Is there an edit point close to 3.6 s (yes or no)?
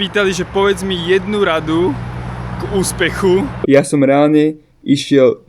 yes